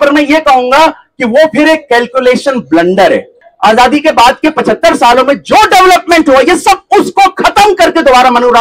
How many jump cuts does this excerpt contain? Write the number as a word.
one